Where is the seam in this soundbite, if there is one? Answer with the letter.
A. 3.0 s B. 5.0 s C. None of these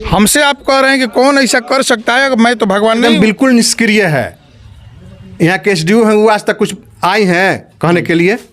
A